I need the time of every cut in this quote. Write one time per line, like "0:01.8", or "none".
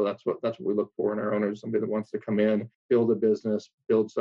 0:02.8